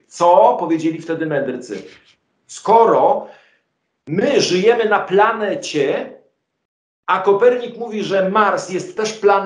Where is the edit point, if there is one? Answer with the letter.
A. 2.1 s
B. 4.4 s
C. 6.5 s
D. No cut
D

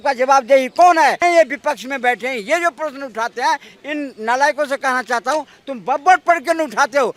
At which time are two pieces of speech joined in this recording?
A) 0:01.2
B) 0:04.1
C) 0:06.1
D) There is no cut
A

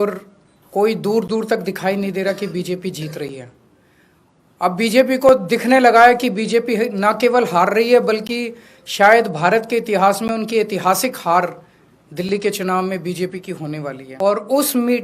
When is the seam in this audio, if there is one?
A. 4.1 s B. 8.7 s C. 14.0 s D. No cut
C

